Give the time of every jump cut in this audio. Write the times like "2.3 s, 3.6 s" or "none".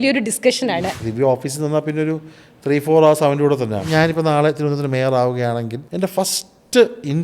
1.0 s, 3.8 s, 5.8 s